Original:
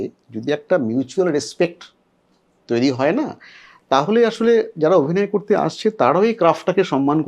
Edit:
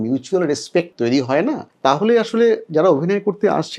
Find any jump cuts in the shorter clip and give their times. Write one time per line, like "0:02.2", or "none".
0:00.9
0:01.7